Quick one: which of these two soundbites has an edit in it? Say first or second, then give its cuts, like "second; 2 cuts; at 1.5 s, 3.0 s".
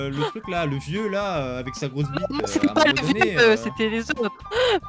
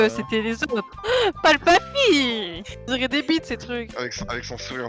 second; 1 cut; at 2.9 s